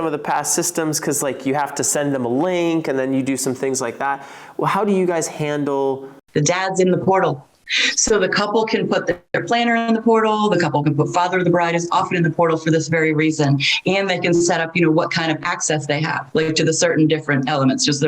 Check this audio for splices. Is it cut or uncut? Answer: cut